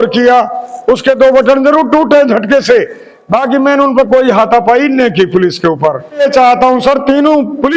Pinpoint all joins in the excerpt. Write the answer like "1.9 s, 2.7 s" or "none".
6.2 s